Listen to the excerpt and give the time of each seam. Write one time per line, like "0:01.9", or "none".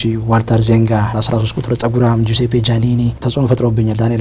0:01.1
0:03.2